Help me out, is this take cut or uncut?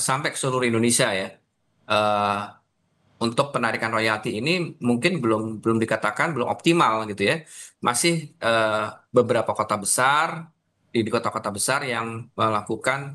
uncut